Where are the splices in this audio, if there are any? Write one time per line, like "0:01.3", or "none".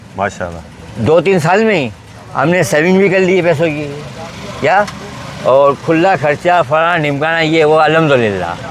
none